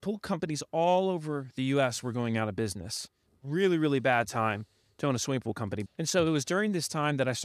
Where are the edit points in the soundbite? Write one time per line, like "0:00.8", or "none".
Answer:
0:05.8